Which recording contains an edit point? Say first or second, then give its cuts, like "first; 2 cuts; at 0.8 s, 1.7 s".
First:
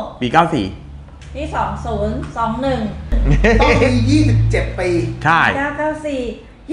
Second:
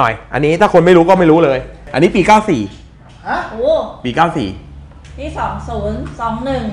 second; 1 cut; at 1.9 s